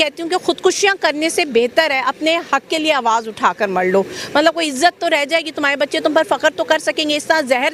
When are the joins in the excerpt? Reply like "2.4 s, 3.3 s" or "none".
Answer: none